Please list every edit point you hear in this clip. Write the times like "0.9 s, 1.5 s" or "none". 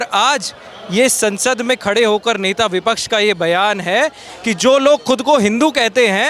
none